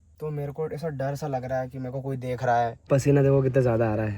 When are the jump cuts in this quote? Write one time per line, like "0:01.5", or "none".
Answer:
0:02.8